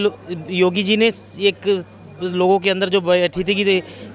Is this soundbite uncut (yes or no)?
yes